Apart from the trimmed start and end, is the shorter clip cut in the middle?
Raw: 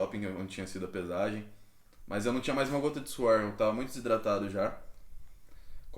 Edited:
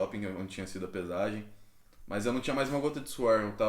no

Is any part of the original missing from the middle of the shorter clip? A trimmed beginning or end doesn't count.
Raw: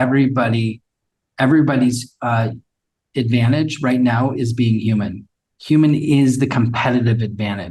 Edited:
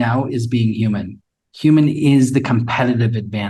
no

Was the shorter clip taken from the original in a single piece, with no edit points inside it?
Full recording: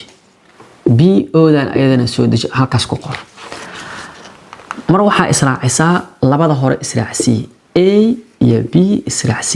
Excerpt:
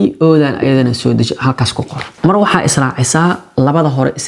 no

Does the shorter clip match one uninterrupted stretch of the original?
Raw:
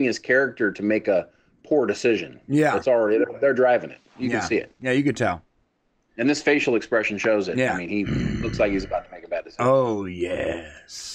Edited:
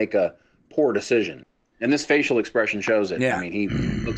no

